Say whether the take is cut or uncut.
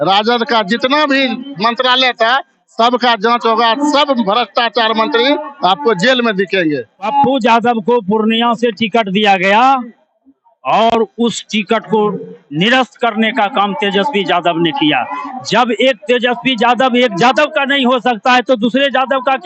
cut